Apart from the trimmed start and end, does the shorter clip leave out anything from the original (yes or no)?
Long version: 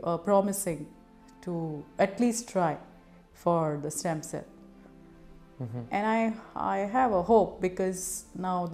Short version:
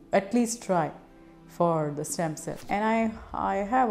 yes